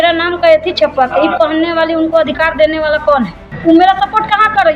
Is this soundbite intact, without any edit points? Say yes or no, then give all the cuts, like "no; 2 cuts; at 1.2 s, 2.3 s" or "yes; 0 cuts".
no; 1 cut; at 3.5 s